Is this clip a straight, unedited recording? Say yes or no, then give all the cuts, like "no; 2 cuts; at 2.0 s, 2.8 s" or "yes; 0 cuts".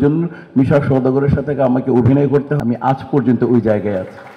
no; 1 cut; at 2.5 s